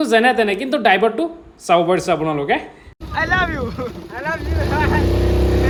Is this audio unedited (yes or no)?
yes